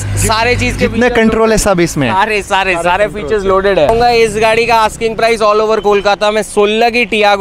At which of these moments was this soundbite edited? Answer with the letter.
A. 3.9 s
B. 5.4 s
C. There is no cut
A